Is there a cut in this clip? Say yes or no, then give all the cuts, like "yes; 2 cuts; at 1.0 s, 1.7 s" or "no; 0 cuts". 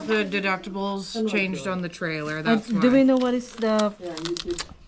no; 0 cuts